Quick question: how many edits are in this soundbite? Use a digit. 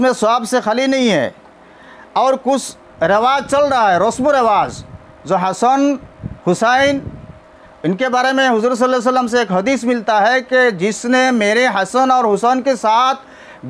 0